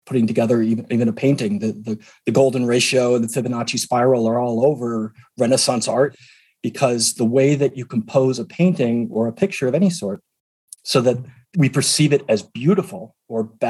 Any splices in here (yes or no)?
yes